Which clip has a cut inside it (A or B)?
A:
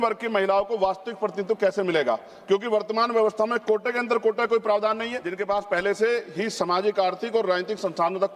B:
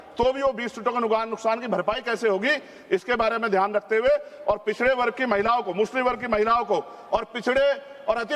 A